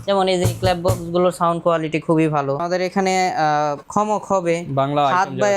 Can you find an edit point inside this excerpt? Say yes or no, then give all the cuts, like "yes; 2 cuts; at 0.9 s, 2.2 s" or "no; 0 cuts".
yes; 2 cuts; at 2.6 s, 3.8 s